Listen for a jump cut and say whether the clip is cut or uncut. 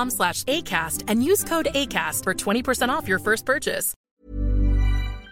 cut